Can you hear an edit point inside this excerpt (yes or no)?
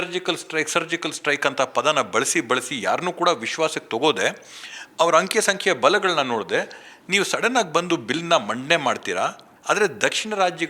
yes